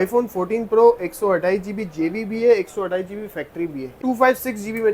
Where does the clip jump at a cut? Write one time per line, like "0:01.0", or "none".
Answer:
0:04.0